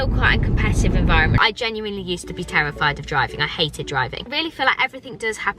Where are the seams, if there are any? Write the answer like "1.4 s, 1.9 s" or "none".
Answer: 1.4 s, 4.3 s